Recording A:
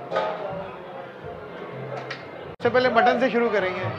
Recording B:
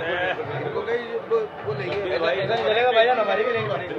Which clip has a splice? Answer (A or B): A